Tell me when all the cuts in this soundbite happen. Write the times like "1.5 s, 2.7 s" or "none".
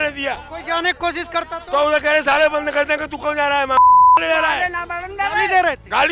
none